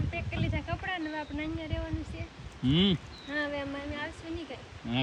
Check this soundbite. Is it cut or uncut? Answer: uncut